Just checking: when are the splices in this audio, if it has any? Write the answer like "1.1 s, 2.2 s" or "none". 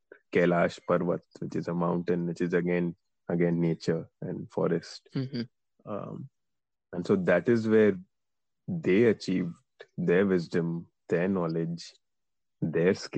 none